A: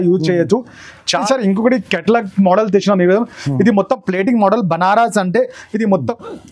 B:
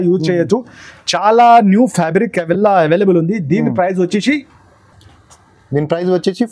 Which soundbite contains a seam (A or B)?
A